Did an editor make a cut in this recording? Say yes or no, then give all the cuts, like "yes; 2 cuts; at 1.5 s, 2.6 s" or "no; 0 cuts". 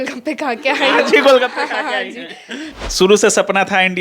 yes; 1 cut; at 2.8 s